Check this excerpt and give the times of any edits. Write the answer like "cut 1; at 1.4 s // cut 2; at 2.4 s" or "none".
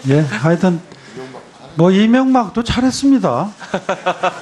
none